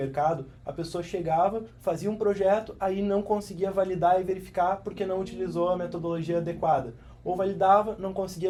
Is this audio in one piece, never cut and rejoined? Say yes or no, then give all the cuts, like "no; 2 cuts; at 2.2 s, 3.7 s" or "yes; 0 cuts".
yes; 0 cuts